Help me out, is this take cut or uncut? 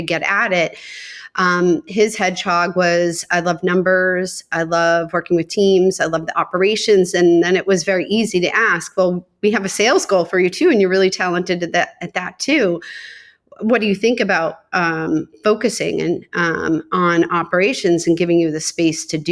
uncut